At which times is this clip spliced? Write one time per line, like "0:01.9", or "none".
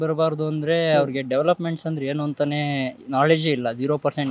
none